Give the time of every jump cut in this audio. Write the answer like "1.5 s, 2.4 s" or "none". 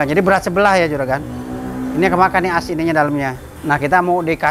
3.5 s